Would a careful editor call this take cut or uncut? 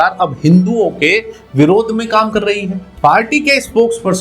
uncut